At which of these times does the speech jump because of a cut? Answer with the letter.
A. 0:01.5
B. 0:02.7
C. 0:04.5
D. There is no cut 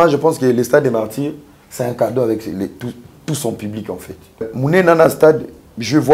C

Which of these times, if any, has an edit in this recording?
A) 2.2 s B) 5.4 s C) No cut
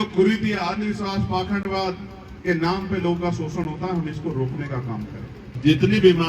B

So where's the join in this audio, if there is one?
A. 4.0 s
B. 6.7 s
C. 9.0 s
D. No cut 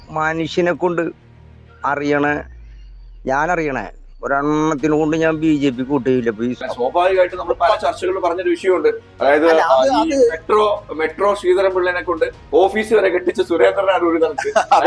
B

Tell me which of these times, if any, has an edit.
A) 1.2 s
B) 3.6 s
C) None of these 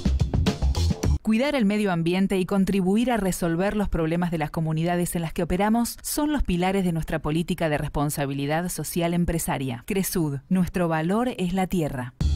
A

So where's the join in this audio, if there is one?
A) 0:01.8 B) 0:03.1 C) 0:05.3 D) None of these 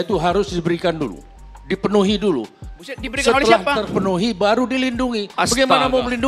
D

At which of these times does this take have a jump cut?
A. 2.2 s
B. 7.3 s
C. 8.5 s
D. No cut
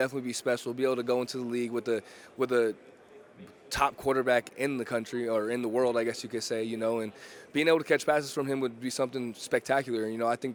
D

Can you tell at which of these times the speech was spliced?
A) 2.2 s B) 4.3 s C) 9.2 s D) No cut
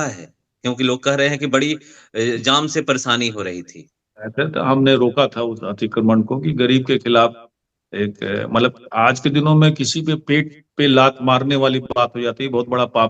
B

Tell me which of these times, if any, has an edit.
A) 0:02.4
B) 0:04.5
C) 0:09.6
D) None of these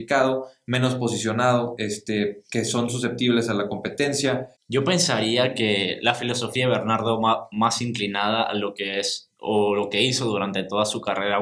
B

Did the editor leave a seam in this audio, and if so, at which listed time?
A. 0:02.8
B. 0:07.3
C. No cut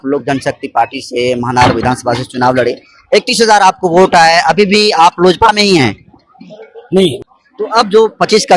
B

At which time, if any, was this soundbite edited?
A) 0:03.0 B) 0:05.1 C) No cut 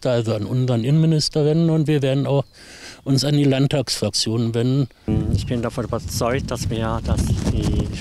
B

